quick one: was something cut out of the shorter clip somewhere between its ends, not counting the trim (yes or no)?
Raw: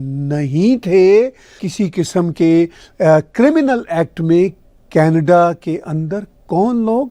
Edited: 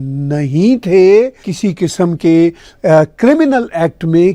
yes